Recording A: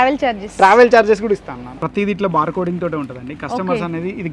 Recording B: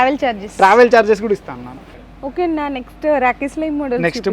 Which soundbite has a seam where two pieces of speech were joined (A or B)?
A